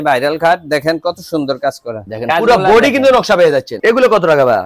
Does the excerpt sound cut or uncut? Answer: uncut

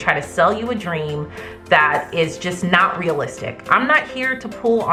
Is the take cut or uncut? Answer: uncut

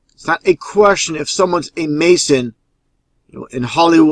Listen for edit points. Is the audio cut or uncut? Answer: cut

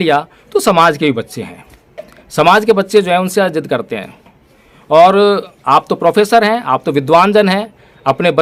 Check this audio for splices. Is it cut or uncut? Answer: uncut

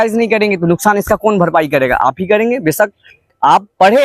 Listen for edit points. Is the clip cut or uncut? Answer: uncut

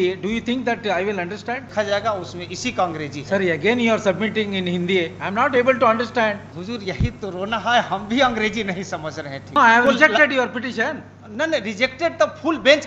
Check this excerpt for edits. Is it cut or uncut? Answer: cut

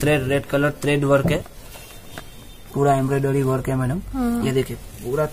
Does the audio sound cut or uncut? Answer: cut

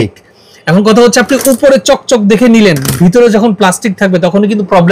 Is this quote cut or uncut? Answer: uncut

